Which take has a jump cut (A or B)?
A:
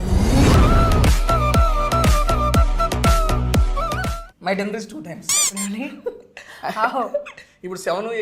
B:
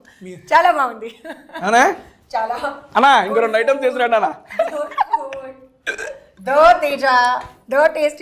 A